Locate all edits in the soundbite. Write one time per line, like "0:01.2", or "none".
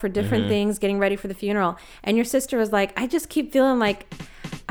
none